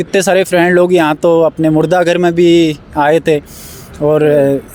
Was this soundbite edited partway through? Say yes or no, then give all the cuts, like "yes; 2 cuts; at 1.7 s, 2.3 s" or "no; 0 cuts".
no; 0 cuts